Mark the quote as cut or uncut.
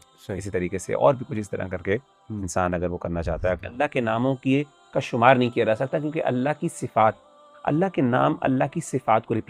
cut